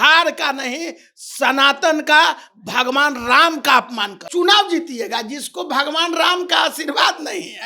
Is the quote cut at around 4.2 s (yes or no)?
yes